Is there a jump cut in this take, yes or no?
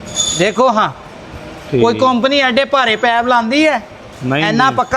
no